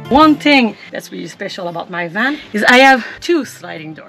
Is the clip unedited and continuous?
no; 3 cuts; at 0.9 s, 2.4 s, 3.1 s

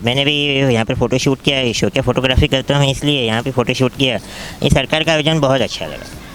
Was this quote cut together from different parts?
no; 0 cuts

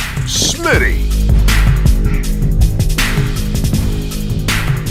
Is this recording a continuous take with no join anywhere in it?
yes; 0 cuts

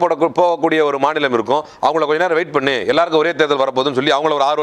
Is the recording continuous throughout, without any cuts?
yes; 0 cuts

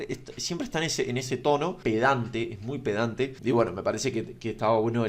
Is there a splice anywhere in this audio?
yes; 2 cuts; at 1.8 s, 3.4 s

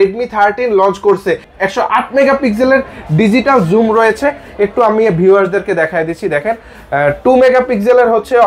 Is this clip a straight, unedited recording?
no; 1 cut; at 1.6 s

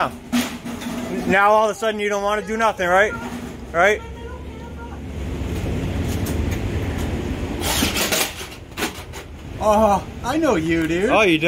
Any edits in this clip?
no; 0 cuts

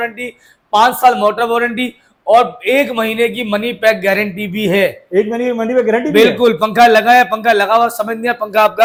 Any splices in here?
no; 0 cuts

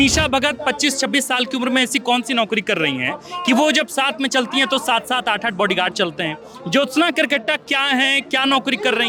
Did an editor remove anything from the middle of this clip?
no; 0 cuts

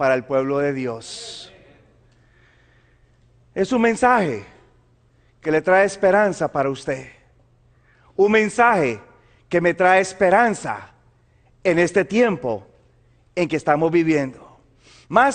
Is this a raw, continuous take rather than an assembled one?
yes; 0 cuts

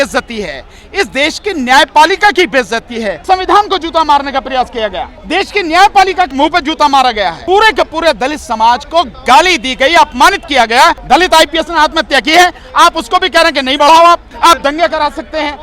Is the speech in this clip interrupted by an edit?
yes; 6 cuts; at 3.2 s, 5.1 s, 6.3 s, 7.4 s, 11.0 s, 14.3 s

